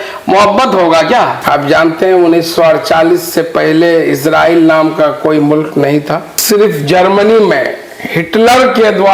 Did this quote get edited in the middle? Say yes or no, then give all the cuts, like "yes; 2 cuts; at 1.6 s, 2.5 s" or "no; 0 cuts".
yes; 2 cuts; at 1.4 s, 6.3 s